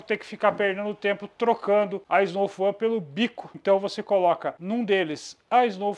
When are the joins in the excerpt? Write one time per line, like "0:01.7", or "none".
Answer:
0:02.0
0:03.5
0:04.5